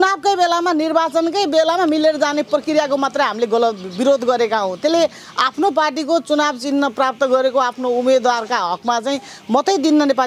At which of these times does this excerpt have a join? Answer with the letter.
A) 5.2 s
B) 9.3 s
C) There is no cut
C